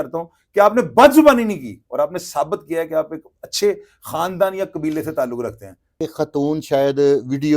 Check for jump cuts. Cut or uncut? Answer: cut